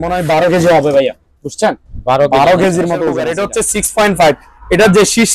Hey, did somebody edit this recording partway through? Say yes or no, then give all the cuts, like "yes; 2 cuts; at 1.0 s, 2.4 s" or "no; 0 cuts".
yes; 1 cut; at 3.3 s